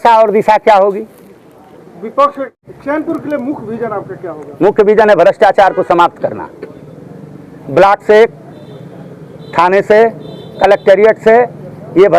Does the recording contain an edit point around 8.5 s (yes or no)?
no